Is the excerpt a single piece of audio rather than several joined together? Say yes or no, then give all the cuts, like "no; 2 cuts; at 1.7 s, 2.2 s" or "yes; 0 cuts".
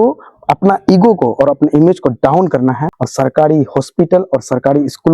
no; 1 cut; at 3.0 s